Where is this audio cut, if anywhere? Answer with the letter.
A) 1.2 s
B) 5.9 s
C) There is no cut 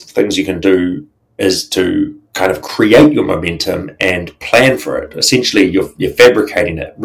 C